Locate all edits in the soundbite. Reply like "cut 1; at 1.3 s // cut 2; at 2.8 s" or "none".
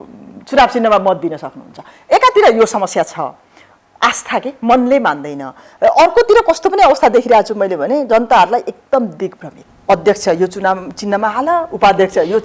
none